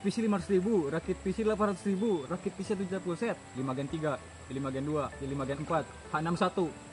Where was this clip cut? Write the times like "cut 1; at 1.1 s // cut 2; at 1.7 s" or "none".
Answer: cut 1; at 2.3 s